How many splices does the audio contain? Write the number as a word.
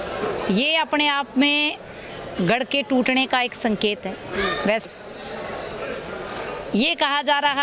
one